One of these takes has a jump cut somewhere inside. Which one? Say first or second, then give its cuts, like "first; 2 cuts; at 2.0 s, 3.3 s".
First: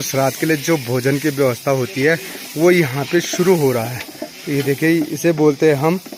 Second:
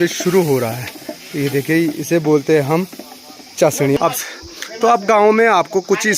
second; 1 cut; at 4.0 s